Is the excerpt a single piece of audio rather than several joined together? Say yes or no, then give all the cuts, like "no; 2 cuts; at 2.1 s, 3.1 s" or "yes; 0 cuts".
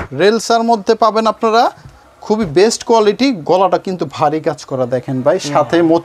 yes; 0 cuts